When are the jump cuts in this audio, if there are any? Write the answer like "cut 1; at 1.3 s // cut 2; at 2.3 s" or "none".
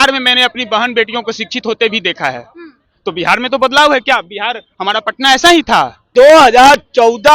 cut 1; at 6.1 s